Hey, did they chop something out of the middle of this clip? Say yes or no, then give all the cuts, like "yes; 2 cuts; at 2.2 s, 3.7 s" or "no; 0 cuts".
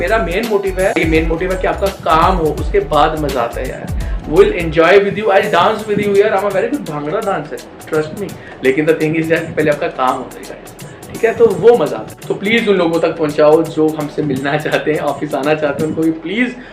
yes; 2 cuts; at 0.9 s, 12.1 s